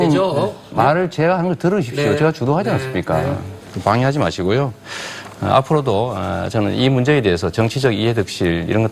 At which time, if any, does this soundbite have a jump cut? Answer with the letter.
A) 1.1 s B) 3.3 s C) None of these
B